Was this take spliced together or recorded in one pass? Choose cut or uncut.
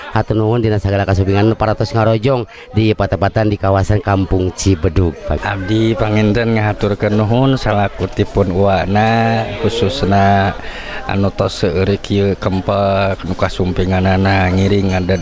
cut